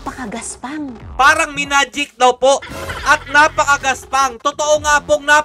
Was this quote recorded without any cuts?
no; 1 cut; at 1.1 s

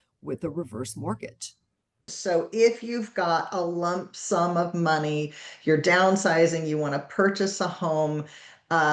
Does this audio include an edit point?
yes; 1 cut; at 2.1 s

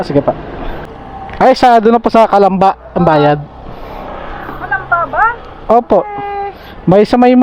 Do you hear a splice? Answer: yes; 1 cut; at 0.9 s

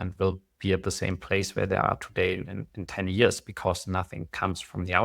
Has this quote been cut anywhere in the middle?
no; 0 cuts

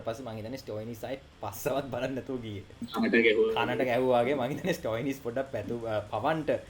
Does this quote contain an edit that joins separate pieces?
yes; 1 cut; at 2.8 s

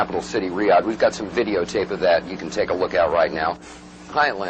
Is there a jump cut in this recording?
no; 0 cuts

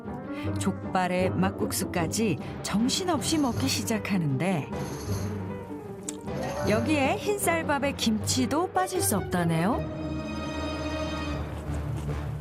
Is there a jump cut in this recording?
no; 0 cuts

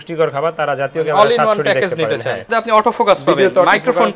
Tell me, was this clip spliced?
yes; 1 cut; at 2.4 s

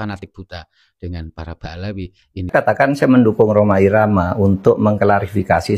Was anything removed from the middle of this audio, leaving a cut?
yes; 1 cut; at 2.5 s

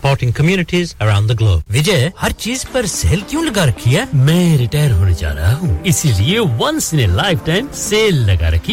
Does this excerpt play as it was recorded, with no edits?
yes; 0 cuts

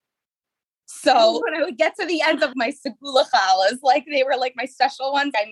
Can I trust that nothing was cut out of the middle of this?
no; 1 cut; at 1.4 s

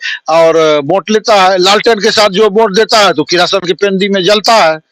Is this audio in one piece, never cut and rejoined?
yes; 0 cuts

